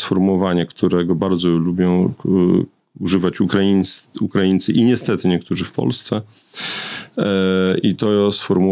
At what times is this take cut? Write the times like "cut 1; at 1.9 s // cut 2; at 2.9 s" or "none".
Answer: none